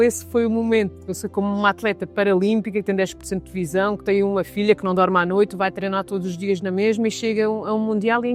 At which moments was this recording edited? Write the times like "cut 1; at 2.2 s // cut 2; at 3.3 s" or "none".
none